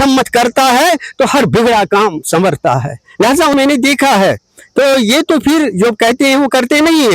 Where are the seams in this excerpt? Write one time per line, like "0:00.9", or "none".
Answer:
0:03.5